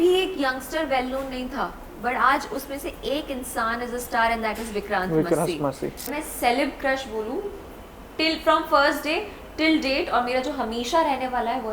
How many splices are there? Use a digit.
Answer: 1